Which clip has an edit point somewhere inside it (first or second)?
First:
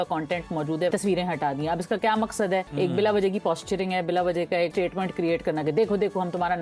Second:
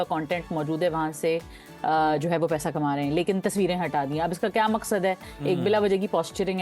first